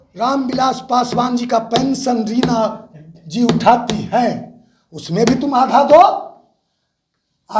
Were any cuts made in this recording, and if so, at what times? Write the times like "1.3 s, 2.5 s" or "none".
none